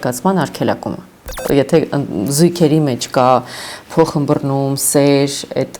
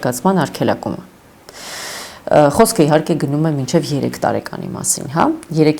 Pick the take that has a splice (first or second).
first